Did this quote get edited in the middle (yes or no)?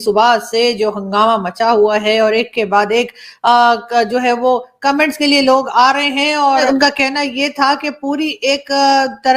yes